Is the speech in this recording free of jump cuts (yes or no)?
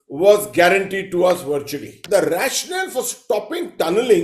no